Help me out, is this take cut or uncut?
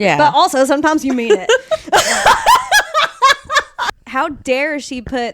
cut